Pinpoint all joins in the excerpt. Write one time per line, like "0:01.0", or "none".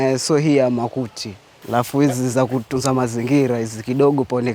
0:01.5